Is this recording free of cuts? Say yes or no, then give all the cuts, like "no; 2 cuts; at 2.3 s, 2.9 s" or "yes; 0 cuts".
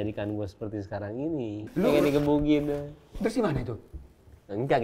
no; 1 cut; at 1.7 s